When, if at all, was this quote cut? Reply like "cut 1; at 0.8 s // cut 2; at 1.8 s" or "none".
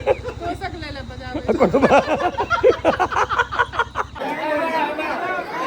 cut 1; at 4.1 s